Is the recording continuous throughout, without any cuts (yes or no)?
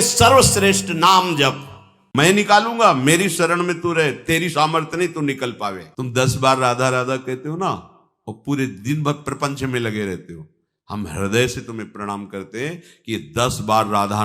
no